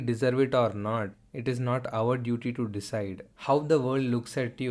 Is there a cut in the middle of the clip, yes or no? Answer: yes